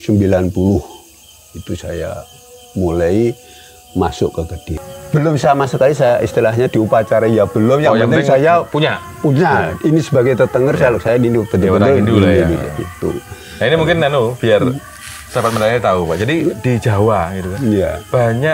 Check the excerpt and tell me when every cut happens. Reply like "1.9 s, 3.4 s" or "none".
4.8 s